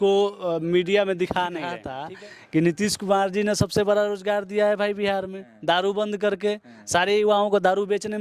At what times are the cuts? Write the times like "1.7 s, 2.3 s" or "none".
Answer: 1.9 s